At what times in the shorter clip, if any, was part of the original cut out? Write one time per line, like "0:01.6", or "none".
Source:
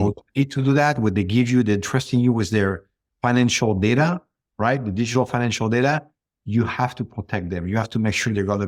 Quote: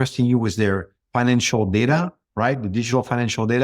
0:00.9
0:02.2